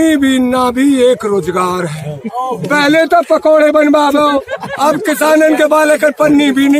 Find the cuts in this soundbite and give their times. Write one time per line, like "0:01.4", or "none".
none